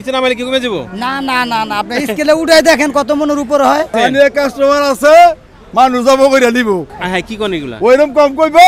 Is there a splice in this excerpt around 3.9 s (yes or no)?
yes